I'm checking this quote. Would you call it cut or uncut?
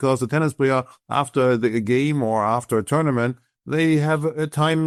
uncut